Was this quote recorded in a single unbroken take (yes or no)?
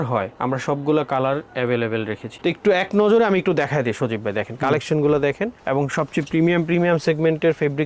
no